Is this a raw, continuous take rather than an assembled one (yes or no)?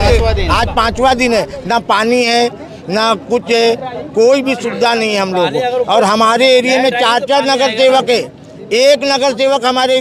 yes